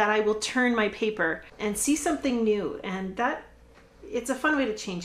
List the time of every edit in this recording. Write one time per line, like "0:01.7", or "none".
0:01.5

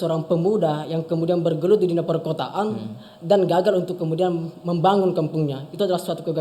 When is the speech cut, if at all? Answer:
none

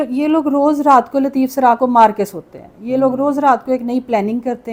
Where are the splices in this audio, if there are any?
none

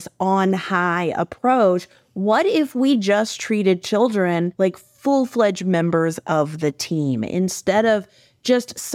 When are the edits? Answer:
0:04.5

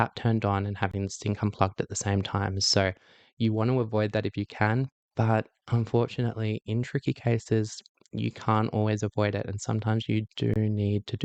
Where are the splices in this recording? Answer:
none

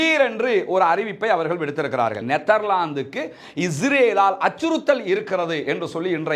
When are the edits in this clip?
0:02.2

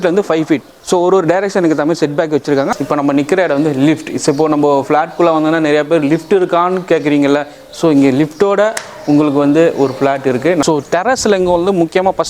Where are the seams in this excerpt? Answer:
0:02.7
0:10.6

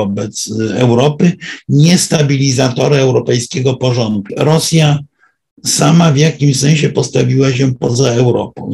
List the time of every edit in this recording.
0:04.3

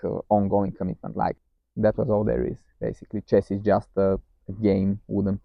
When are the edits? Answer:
0:01.3

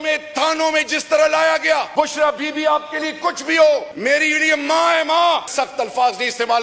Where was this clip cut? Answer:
0:01.9
0:03.9
0:05.5

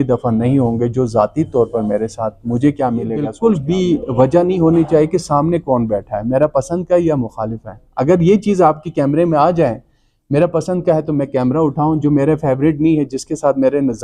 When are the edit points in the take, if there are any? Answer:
0:03.3

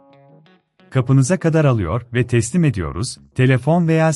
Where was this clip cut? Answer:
0:00.9

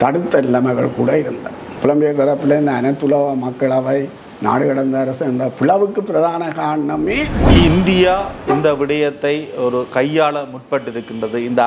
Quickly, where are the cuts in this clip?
0:01.7
0:07.5

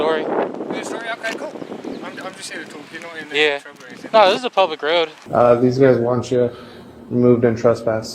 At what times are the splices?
0:05.2

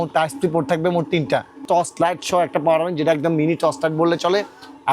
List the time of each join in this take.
0:01.6

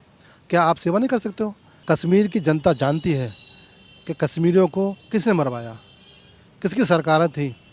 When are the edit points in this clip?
0:01.7

